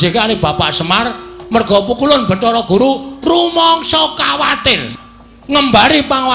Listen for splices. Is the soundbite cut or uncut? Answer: cut